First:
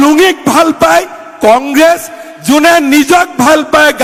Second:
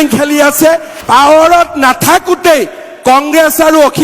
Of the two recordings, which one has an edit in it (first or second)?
second